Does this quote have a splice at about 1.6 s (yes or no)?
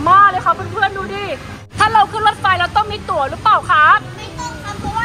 yes